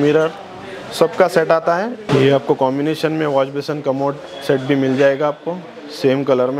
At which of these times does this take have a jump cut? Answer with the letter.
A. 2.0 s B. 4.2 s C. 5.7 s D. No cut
A